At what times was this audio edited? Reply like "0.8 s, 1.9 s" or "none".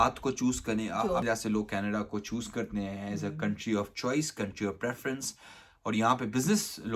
1.2 s

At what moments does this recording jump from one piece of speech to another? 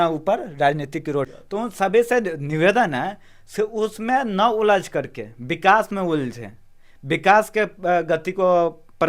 1.4 s

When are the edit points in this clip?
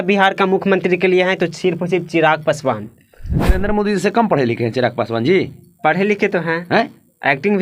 3.6 s

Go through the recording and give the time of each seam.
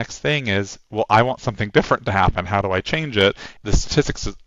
3.5 s

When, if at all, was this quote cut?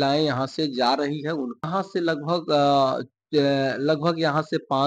1.7 s

